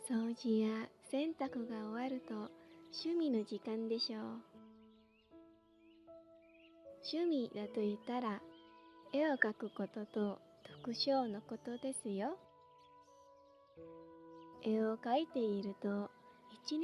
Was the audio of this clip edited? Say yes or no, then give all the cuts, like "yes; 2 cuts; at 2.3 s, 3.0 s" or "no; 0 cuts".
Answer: yes; 2 cuts; at 12.5 s, 14.6 s